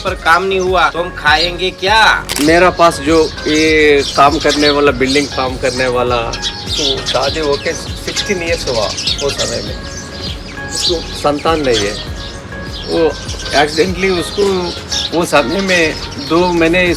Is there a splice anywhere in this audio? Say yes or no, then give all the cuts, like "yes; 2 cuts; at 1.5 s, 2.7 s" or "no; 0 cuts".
yes; 2 cuts; at 0.9 s, 2.3 s